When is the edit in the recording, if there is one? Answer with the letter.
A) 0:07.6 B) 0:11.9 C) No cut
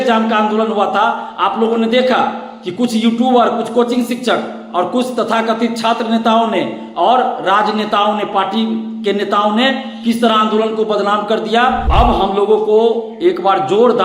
B